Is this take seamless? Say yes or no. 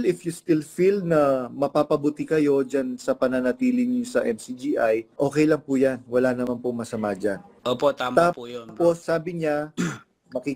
no